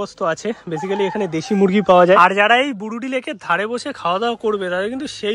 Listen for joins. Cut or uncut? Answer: cut